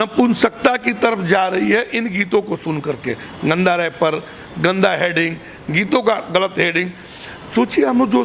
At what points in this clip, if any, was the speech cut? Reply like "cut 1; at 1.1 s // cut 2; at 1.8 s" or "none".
none